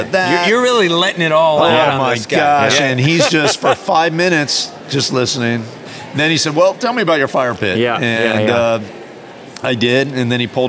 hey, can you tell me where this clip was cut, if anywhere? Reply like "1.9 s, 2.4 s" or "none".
5.8 s